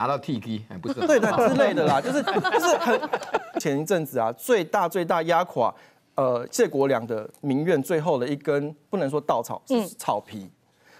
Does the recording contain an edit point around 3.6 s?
yes; 1 cut; at 3.6 s

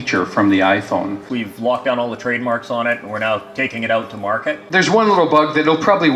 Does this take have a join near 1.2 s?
yes; 2 cuts; at 1.2 s, 4.7 s

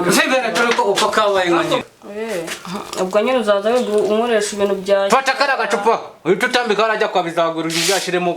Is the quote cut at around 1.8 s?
yes; 1 cut; at 1.8 s

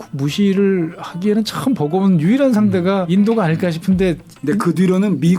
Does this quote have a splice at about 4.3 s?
no; 1 cut; at 3.1 s

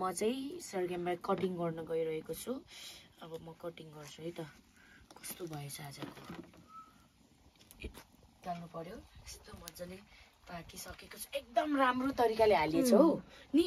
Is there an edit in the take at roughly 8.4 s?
yes; 1 cut; at 8.4 s

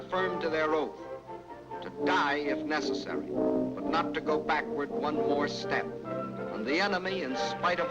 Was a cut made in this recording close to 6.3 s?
yes; 1 cut; at 6.3 s

